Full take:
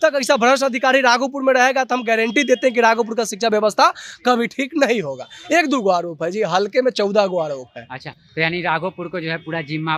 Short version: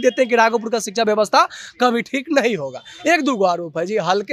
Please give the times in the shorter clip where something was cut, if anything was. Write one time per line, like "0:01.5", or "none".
none